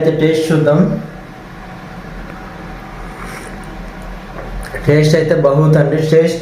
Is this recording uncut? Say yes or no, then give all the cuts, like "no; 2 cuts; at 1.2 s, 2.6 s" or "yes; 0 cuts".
yes; 0 cuts